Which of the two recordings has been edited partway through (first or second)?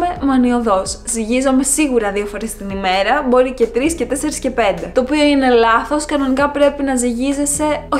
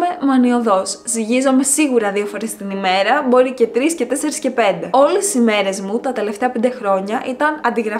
second